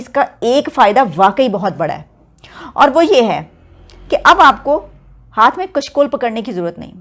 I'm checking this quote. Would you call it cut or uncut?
uncut